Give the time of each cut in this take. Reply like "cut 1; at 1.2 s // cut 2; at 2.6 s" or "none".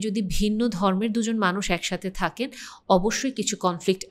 none

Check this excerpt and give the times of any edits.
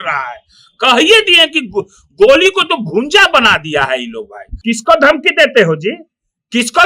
cut 1; at 4.4 s

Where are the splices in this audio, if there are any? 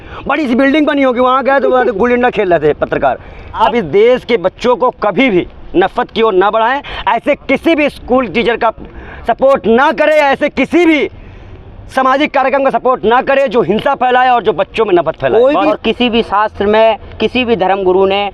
cut 1; at 3.6 s // cut 2; at 15.7 s

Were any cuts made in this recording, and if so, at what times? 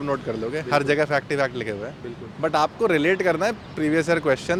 none

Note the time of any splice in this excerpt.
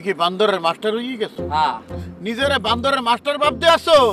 none

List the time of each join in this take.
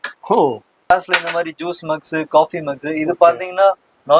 cut 1; at 0.9 s

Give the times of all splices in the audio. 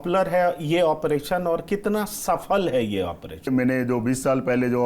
cut 1; at 3.5 s

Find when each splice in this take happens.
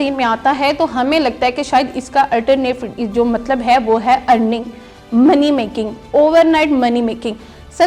none

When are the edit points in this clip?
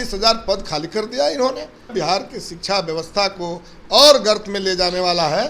cut 1; at 1.9 s

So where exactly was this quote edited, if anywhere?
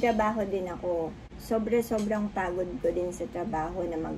none

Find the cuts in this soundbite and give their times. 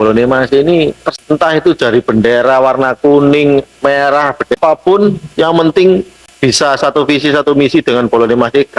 cut 1; at 1.1 s // cut 2; at 4.6 s // cut 3; at 6.2 s

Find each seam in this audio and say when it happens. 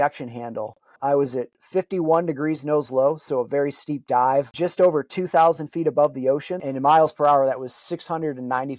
cut 1; at 0.9 s // cut 2; at 4.5 s // cut 3; at 6.6 s

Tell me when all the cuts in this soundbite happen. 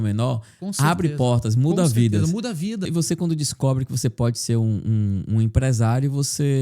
cut 1; at 2.9 s

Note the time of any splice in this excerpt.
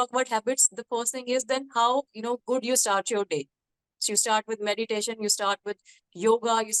none

